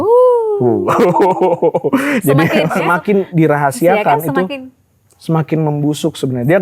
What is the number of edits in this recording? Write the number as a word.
one